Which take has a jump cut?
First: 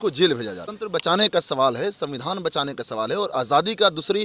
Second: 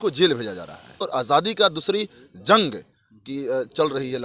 second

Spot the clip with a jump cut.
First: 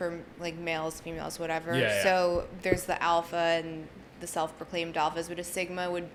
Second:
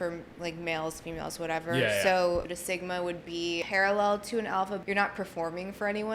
second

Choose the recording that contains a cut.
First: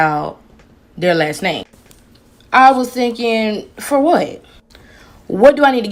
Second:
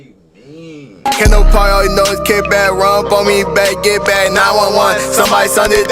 second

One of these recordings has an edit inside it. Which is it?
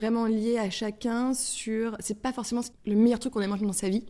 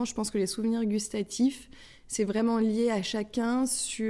first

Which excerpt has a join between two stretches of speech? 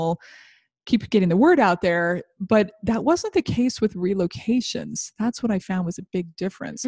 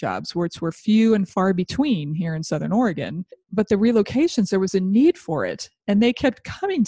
second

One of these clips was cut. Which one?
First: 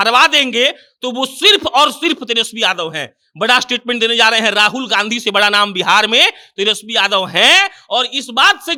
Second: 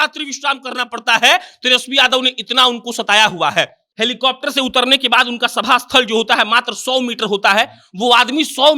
second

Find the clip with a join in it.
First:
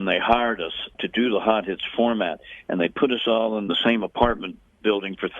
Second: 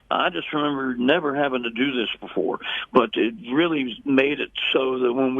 first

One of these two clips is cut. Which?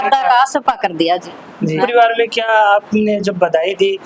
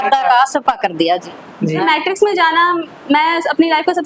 second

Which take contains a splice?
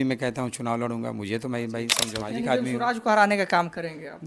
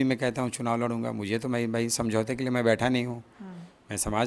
first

